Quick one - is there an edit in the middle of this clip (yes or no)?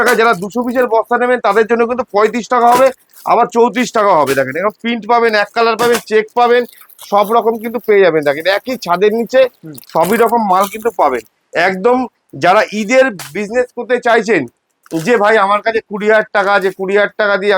no